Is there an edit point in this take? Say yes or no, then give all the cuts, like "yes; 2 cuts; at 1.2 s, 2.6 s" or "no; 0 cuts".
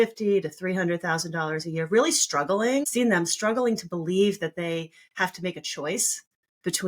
yes; 1 cut; at 2.9 s